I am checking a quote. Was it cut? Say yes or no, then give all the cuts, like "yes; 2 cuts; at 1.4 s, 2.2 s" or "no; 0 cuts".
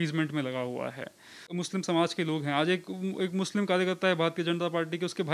yes; 1 cut; at 1.5 s